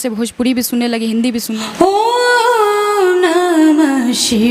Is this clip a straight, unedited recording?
no; 1 cut; at 1.5 s

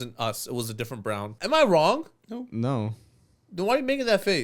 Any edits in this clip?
yes; 1 cut; at 1.3 s

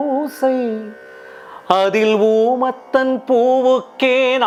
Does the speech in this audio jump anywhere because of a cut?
no; 0 cuts

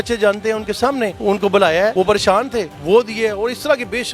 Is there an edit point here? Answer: no; 0 cuts

